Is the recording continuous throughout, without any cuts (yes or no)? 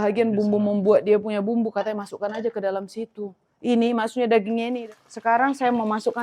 no